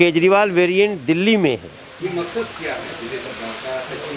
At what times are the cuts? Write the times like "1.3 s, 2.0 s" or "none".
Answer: none